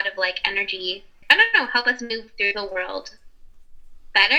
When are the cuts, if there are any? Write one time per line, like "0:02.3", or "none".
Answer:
0:01.2